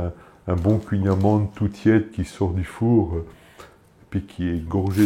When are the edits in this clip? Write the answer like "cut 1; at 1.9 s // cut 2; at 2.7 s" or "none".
none